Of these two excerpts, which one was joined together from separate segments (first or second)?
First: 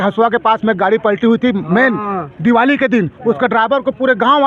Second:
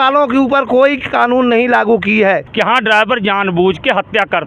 second